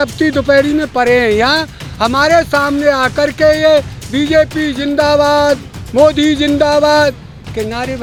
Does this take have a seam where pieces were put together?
no; 0 cuts

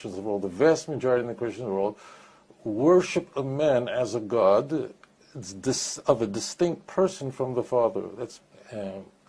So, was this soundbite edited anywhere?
yes; 1 cut; at 8.3 s

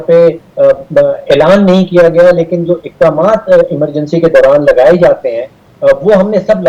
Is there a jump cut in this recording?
no; 0 cuts

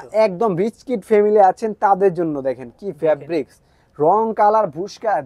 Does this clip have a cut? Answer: no; 0 cuts

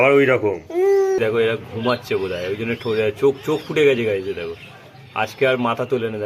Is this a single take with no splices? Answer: no; 1 cut; at 1.2 s

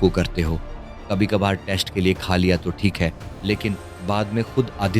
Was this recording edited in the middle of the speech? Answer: yes; 1 cut; at 3.9 s

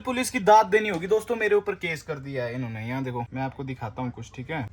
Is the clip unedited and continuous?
yes; 0 cuts

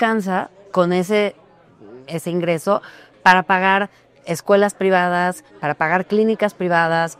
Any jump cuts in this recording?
no; 0 cuts

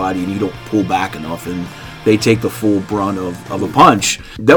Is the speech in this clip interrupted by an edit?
no; 0 cuts

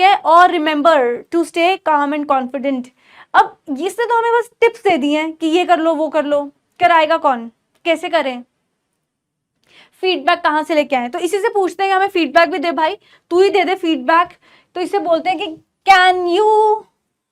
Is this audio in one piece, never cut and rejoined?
yes; 0 cuts

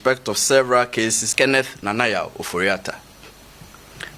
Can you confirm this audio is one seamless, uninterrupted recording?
no; 1 cut; at 1.2 s

